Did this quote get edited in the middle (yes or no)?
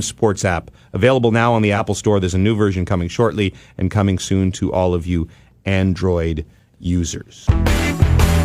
yes